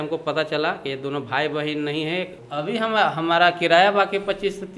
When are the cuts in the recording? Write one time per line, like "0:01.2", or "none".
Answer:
0:02.4